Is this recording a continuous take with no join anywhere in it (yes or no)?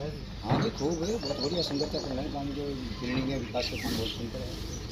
yes